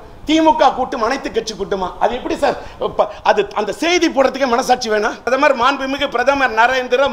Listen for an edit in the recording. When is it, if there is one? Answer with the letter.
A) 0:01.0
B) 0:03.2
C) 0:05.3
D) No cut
C